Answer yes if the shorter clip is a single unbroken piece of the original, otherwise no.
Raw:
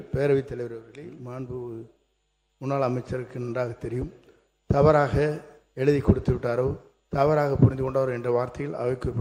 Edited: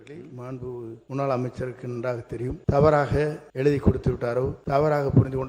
no